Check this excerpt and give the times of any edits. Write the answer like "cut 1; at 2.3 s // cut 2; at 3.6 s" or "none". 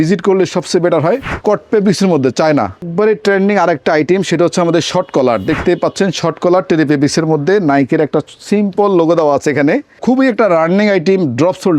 cut 1; at 1.3 s // cut 2; at 2.9 s // cut 3; at 10.0 s